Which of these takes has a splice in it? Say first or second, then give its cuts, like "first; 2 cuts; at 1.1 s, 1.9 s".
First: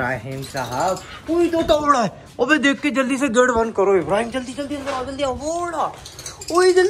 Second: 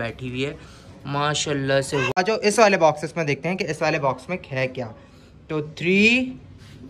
second; 1 cut; at 2.1 s